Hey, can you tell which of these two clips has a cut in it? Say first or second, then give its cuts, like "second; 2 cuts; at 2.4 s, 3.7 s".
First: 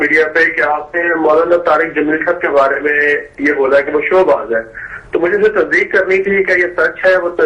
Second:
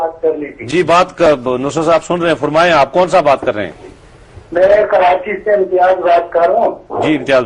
second; 1 cut; at 1.1 s